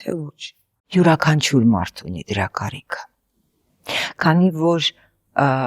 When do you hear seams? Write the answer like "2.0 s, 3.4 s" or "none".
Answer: none